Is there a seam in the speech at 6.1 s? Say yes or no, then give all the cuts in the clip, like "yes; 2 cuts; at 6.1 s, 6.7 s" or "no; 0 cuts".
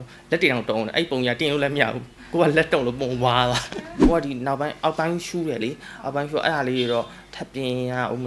no; 1 cut; at 3.9 s